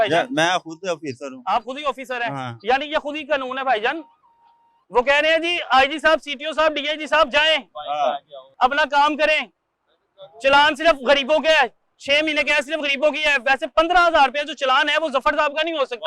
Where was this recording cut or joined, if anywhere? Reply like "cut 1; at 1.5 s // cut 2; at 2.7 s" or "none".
none